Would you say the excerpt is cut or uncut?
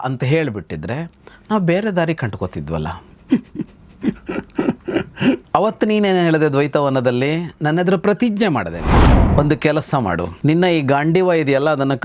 cut